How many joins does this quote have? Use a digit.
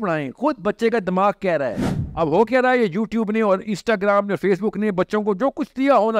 1